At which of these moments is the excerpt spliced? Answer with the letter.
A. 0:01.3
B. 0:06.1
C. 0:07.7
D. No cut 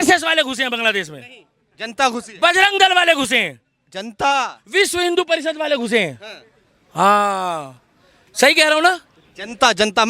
D